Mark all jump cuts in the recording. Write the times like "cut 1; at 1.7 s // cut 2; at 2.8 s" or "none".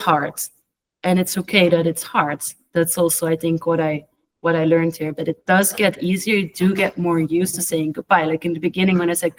none